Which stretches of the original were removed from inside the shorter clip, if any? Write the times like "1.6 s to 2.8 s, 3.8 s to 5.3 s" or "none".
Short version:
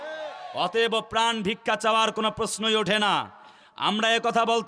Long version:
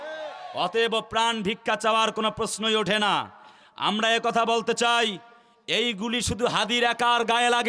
none